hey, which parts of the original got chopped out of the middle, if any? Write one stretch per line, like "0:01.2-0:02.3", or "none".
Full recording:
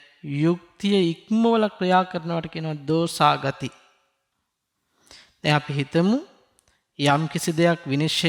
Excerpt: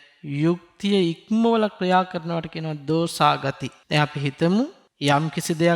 0:03.7-0:05.2
0:06.4-0:06.8

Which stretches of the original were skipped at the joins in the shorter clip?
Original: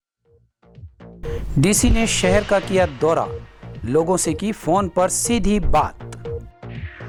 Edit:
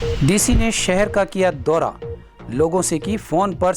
none

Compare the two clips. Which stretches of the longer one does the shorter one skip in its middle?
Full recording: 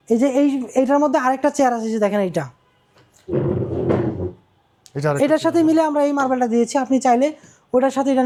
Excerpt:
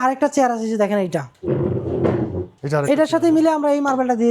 0:02.5-0:03.2
0:04.3-0:04.8

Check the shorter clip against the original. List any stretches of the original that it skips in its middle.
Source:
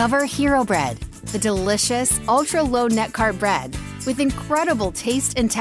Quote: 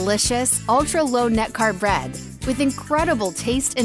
none

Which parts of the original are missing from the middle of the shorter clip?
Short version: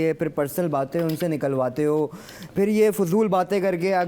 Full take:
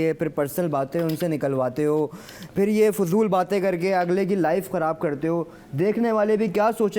none

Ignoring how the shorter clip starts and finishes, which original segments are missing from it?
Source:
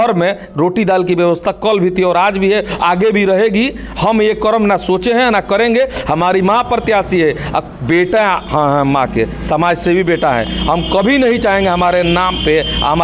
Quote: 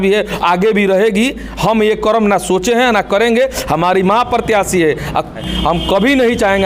0:07.8-0:10.4

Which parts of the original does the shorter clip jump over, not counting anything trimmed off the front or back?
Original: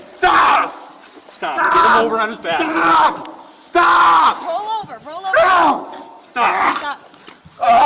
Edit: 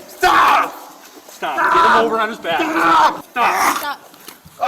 0:03.2-0:06.2

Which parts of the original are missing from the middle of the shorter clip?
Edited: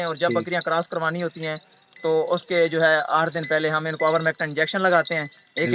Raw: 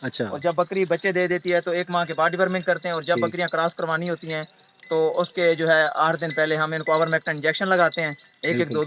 none

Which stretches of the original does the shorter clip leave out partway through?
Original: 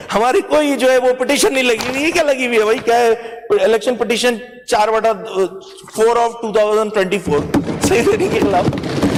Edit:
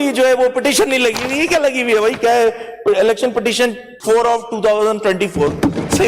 0:04.5-0:05.8

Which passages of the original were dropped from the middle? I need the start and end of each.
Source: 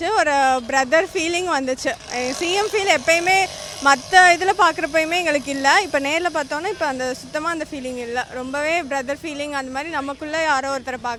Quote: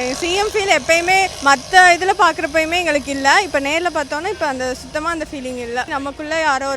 0:03.5-0:03.7
0:08.3-0:09.9

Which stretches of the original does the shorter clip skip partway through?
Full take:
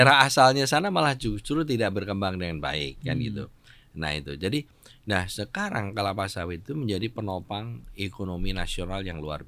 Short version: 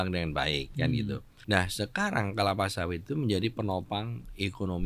0:03.6-0:04.9

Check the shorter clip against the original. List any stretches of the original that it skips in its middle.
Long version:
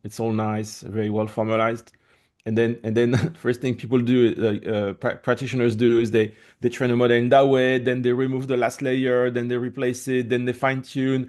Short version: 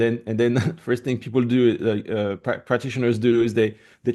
none

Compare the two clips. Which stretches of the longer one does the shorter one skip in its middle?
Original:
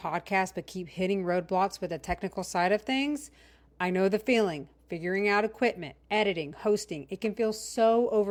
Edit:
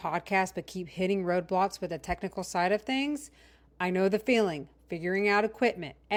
none

